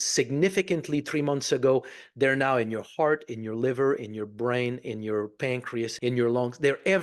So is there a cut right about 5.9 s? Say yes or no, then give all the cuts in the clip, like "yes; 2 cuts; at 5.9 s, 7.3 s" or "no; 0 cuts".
yes; 1 cut; at 5.9 s